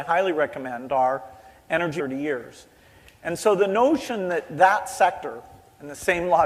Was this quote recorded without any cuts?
yes; 0 cuts

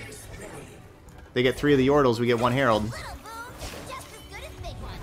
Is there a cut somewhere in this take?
yes; 1 cut; at 1.1 s

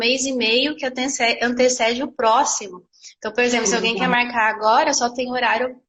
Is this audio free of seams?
yes; 0 cuts

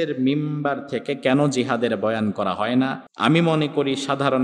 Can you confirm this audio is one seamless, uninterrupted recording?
no; 1 cut; at 3.1 s

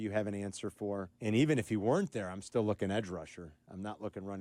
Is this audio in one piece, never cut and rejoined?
no; 1 cut; at 1.1 s

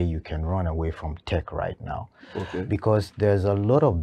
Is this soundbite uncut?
yes; 0 cuts

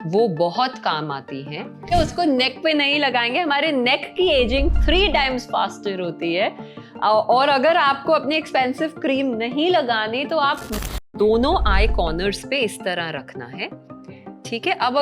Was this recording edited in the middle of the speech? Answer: yes; 2 cuts; at 1.8 s, 11.0 s

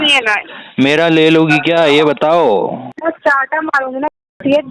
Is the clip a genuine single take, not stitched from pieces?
no; 1 cut; at 2.9 s

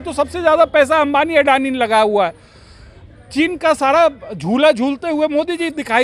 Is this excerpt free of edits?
yes; 0 cuts

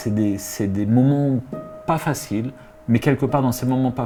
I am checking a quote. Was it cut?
no; 0 cuts

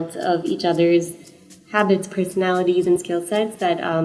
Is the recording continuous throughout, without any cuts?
yes; 0 cuts

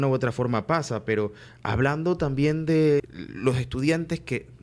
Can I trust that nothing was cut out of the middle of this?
no; 1 cut; at 3.0 s

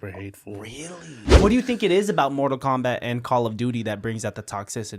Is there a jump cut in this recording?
yes; 1 cut; at 1.2 s

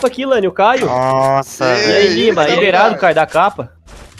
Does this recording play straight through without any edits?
no; 1 cut; at 2.6 s

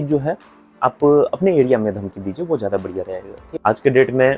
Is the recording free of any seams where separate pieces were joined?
no; 1 cut; at 3.4 s

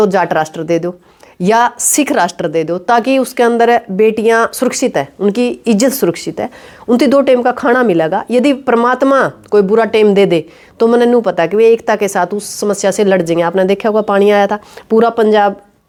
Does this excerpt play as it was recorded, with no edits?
yes; 0 cuts

